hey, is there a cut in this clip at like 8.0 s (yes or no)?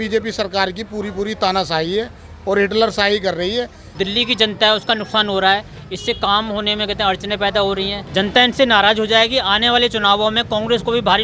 yes